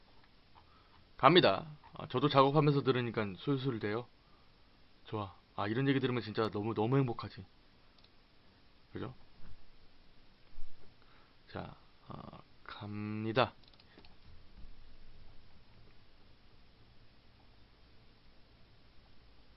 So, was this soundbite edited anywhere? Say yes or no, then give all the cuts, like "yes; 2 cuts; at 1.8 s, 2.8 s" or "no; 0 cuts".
no; 0 cuts